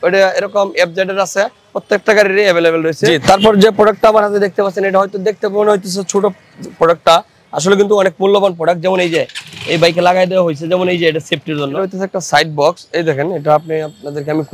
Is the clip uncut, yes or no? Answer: no